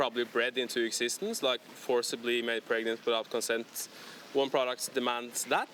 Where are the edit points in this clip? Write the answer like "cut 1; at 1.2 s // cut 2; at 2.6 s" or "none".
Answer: none